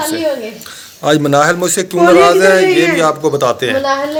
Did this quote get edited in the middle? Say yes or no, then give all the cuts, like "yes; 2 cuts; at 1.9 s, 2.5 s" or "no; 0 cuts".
no; 0 cuts